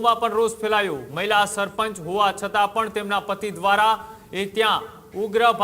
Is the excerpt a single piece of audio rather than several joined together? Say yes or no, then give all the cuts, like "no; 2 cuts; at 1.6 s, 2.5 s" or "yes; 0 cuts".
no; 1 cut; at 1.0 s